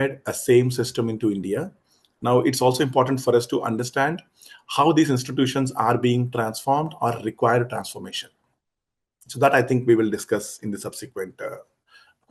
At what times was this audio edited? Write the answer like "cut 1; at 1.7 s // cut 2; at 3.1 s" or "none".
none